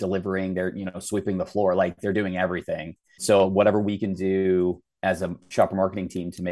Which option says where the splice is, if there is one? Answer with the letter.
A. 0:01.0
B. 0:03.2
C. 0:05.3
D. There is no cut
B